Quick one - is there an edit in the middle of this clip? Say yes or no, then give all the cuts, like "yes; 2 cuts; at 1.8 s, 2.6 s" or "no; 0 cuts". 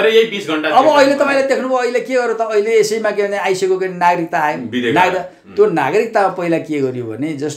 no; 0 cuts